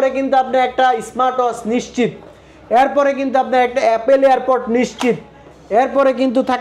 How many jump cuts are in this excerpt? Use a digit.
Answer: 0